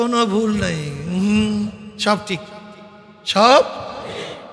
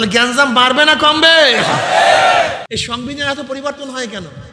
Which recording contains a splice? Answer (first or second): second